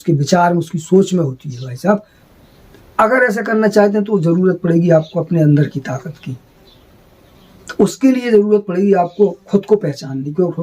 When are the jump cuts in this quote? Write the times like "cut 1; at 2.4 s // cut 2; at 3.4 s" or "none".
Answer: cut 1; at 2.2 s